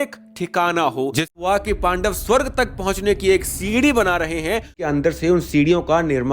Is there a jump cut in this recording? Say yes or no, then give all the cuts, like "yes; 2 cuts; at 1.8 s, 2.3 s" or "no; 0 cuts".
yes; 2 cuts; at 1.3 s, 4.9 s